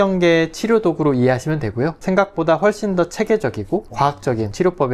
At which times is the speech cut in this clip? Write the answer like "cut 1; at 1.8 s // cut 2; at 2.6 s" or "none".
cut 1; at 2.0 s // cut 2; at 4.2 s

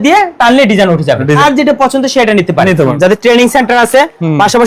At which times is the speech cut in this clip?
cut 1; at 1.4 s // cut 2; at 2.9 s

